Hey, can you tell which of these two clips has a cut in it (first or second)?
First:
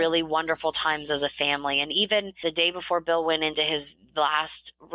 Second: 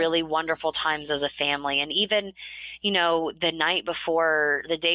first